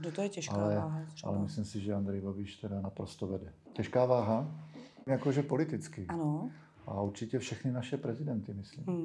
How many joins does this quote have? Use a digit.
2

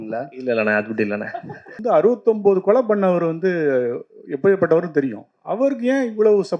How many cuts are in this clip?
1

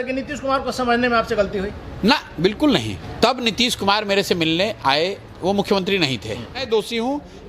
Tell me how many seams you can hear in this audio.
2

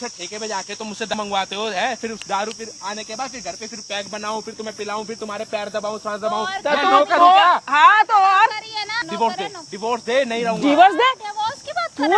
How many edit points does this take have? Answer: 2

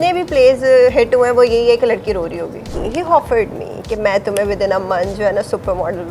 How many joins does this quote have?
1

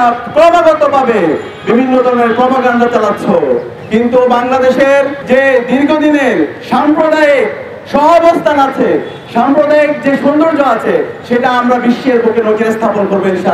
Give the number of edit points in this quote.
1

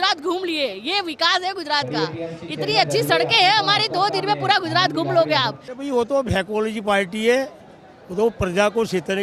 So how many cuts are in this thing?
1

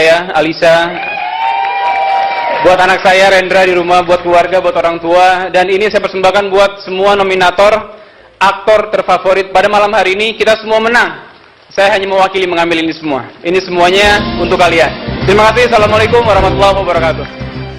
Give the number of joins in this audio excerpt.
1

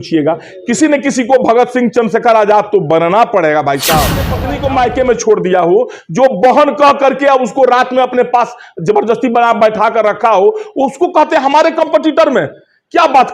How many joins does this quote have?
1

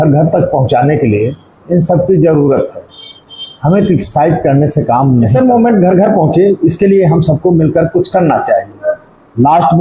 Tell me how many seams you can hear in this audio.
1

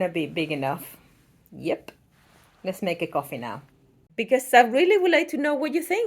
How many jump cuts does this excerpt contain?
1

